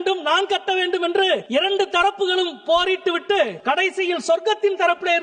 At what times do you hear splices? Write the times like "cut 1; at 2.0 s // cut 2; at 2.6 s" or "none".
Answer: cut 1; at 1.5 s // cut 2; at 3.6 s

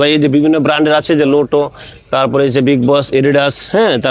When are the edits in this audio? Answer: none

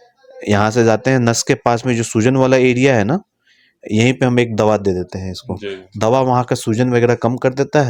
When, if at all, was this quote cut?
none

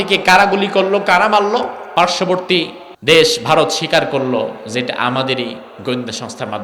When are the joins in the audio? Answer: cut 1; at 1.8 s // cut 2; at 2.8 s

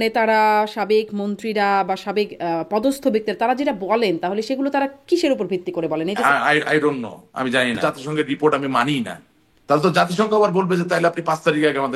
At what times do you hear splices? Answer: cut 1; at 6.2 s // cut 2; at 7.8 s

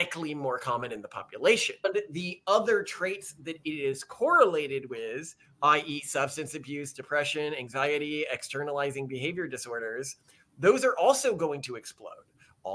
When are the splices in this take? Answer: cut 1; at 1.9 s

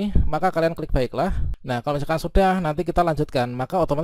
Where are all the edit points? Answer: cut 1; at 1.5 s

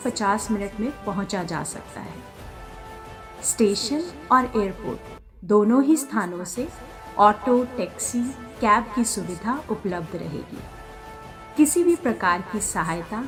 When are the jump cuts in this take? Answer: none

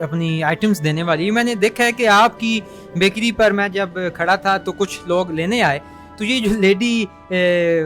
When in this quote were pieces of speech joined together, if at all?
none

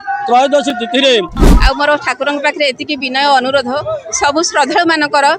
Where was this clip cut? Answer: cut 1; at 1.4 s

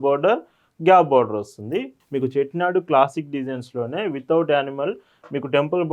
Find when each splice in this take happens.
cut 1; at 1.9 s

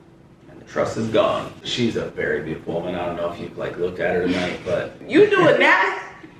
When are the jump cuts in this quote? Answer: cut 1; at 1.7 s // cut 2; at 5.0 s

